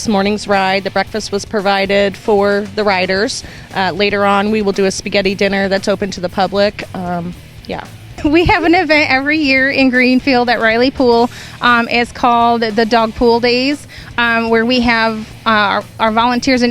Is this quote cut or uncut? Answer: cut